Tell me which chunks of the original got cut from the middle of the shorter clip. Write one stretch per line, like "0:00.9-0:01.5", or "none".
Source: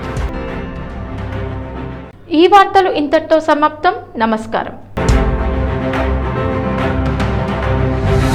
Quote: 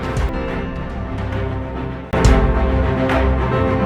0:02.0-0:04.8